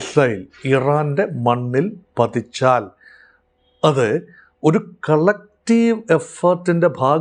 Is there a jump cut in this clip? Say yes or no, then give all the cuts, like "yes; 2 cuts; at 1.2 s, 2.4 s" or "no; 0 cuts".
no; 0 cuts